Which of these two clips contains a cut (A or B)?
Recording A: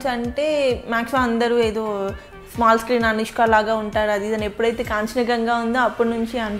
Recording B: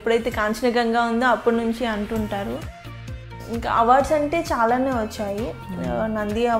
B